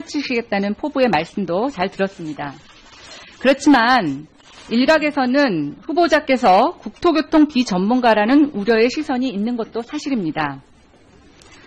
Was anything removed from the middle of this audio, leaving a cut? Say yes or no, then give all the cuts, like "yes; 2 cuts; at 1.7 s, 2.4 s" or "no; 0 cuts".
no; 0 cuts